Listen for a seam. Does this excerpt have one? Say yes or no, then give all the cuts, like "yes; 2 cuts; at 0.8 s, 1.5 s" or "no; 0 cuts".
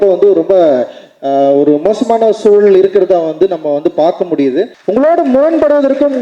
yes; 1 cut; at 4.8 s